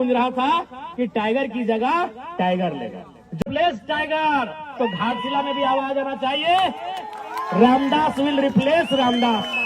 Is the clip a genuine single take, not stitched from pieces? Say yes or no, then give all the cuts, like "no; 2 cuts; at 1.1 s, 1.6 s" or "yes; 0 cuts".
no; 1 cut; at 3.4 s